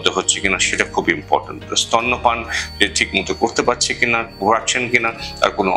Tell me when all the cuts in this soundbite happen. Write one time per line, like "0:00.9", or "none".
none